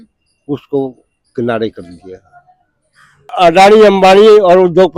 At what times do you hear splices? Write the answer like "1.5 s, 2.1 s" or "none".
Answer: 3.3 s